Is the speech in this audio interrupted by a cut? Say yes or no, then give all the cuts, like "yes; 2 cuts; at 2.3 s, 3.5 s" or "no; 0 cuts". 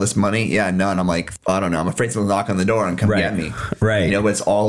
no; 0 cuts